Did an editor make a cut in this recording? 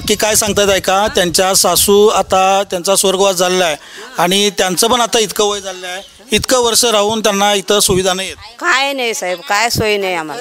no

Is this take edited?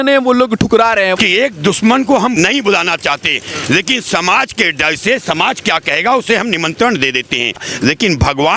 yes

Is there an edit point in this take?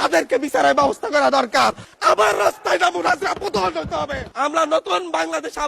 yes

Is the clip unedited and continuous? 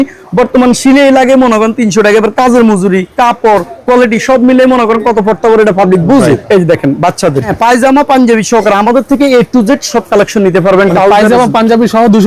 no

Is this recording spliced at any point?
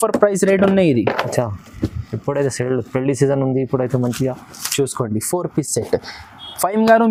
no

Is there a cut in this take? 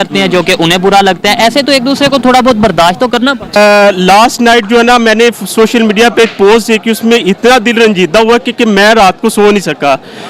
yes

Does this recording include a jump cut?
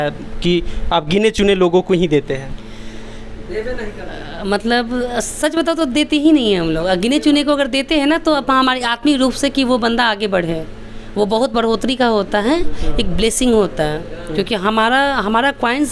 no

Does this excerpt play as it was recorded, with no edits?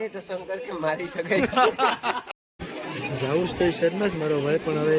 no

